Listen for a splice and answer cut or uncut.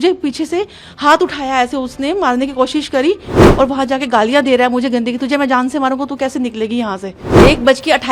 cut